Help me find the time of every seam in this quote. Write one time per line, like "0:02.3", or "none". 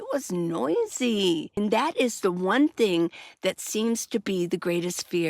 0:01.6